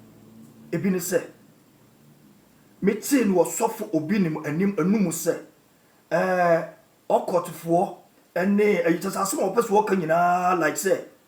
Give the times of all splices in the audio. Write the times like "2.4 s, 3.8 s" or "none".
none